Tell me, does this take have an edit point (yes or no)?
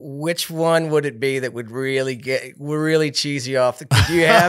no